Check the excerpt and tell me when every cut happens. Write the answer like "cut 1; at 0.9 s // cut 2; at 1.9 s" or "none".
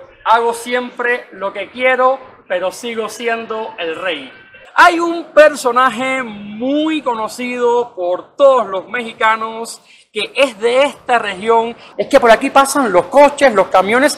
cut 1; at 4.6 s // cut 2; at 11.9 s